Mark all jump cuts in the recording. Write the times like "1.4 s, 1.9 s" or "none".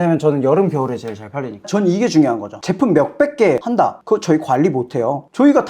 1.6 s, 3.6 s